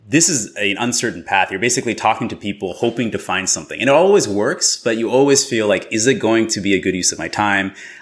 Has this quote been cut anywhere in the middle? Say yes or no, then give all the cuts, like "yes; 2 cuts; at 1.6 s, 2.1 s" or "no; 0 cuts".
no; 0 cuts